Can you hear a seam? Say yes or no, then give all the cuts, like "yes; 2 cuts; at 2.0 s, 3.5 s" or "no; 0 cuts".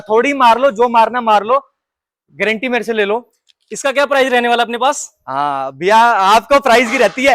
no; 0 cuts